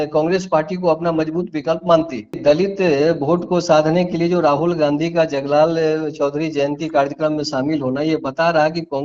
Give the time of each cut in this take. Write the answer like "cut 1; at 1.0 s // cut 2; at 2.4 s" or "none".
cut 1; at 2.3 s